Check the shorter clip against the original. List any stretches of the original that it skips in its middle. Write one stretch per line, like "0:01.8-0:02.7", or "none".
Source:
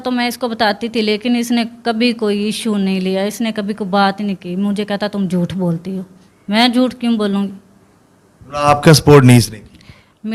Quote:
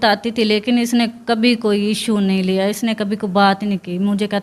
none